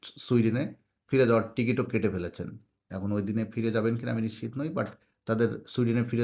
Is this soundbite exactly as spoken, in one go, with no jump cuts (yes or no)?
yes